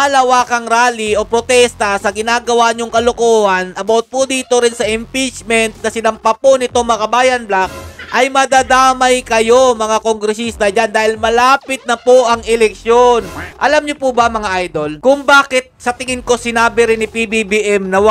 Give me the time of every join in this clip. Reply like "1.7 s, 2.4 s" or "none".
13.4 s